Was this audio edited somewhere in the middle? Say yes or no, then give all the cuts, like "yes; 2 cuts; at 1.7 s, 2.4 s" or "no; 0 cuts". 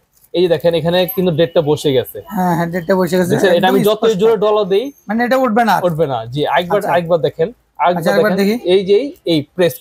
no; 0 cuts